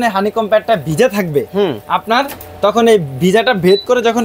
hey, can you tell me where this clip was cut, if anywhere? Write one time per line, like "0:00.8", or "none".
none

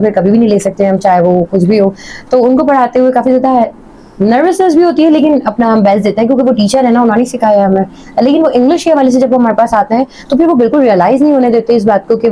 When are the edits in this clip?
none

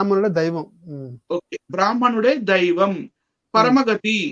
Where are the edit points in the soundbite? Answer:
none

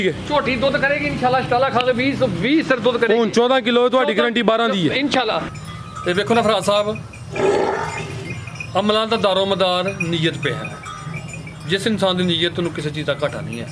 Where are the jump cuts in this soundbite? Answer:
0:05.5

